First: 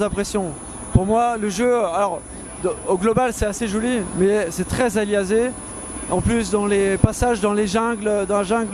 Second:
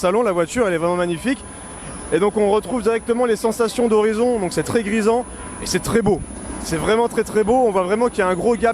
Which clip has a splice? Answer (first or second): second